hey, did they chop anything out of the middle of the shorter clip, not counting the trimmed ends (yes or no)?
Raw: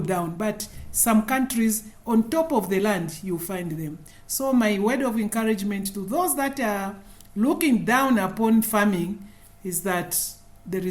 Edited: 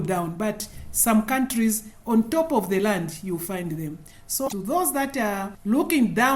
yes